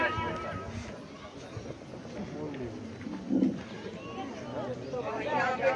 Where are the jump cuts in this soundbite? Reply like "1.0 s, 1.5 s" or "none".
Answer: none